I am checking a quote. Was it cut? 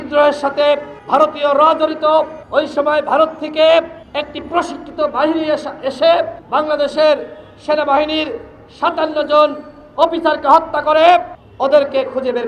yes; 5 cuts; at 0.9 s, 2.4 s, 4.0 s, 6.4 s, 11.4 s

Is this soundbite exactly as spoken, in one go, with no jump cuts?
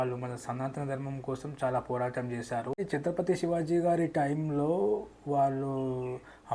no; 1 cut; at 2.8 s

